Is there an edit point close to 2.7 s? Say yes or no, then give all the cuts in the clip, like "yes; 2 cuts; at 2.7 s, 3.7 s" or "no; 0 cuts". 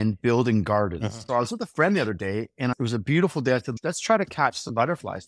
yes; 3 cuts; at 1.1 s, 2.7 s, 3.7 s